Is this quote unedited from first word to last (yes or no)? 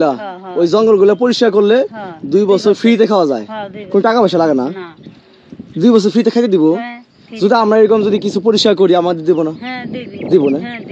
yes